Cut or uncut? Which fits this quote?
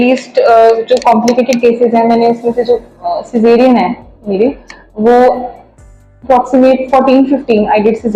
uncut